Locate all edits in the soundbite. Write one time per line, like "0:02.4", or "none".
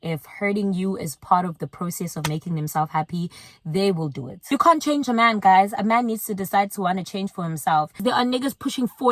0:04.5
0:08.0

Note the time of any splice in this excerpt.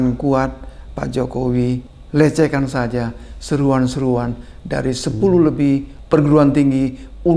0:01.9
0:05.9

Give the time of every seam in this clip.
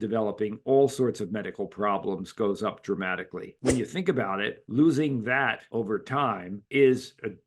0:03.5

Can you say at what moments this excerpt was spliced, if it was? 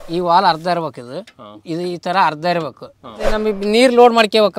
0:03.3

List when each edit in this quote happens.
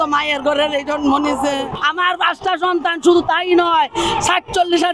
0:01.7

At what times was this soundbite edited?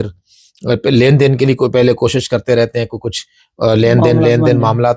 none

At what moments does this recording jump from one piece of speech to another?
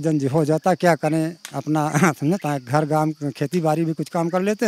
none

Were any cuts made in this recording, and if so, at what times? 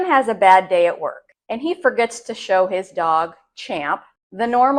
none

